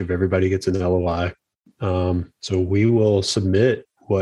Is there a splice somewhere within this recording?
no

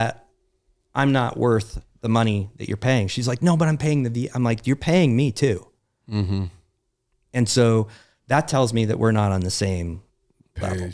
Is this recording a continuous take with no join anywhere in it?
yes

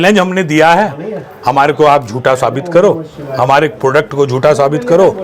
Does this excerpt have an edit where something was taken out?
no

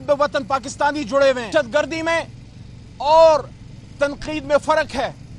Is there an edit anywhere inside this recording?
yes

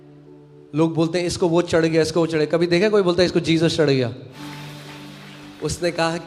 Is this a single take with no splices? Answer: no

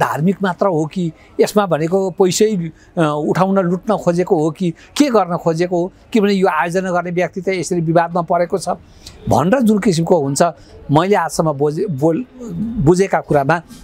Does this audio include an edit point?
no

